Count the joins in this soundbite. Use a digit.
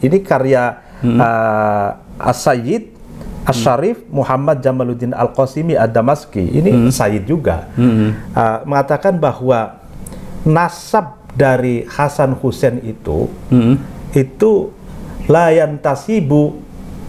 0